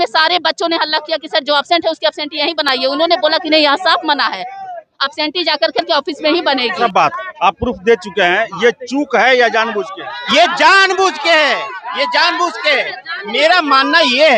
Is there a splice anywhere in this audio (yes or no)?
yes